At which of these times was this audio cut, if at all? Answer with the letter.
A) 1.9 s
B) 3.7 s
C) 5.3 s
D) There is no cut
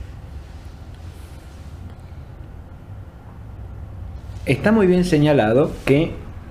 B